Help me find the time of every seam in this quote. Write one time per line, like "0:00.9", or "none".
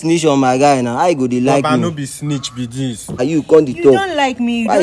0:03.2